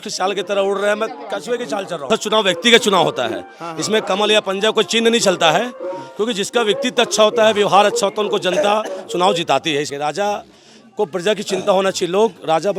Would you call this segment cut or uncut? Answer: cut